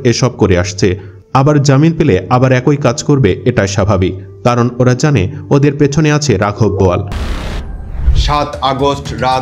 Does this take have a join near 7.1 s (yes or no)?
yes